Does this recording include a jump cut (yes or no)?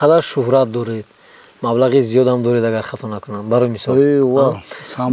no